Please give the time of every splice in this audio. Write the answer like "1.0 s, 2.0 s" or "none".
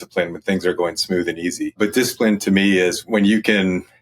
1.8 s, 3.0 s